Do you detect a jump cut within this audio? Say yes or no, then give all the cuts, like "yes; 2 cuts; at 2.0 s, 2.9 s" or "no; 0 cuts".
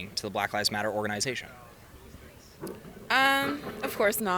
no; 0 cuts